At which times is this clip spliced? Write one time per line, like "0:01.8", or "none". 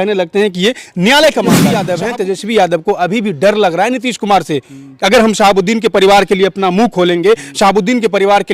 0:01.6